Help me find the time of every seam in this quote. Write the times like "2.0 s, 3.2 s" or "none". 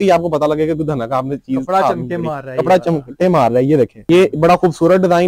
4.0 s